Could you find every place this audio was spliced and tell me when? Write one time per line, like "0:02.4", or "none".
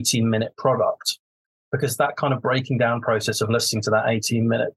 none